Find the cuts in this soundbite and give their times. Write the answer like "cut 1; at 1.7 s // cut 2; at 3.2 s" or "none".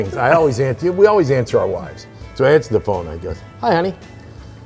none